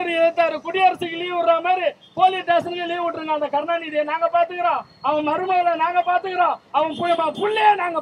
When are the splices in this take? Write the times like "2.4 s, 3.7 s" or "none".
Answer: none